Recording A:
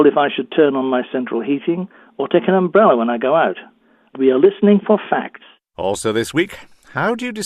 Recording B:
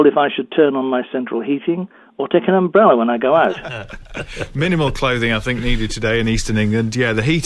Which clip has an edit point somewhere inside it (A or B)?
A